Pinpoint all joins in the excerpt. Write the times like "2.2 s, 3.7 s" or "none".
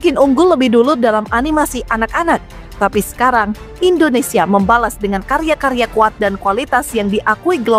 none